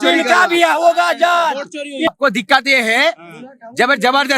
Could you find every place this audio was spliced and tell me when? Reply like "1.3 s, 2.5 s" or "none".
2.1 s